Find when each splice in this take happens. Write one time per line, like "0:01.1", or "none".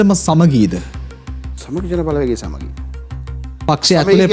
none